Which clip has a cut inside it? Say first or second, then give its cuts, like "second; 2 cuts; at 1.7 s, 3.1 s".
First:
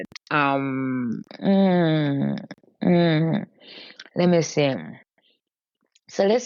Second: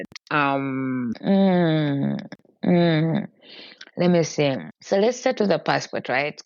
second; 2 cuts; at 1.2 s, 4.7 s